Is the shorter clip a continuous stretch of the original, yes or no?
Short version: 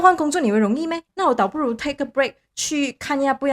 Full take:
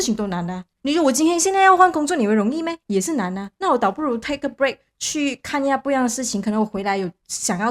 no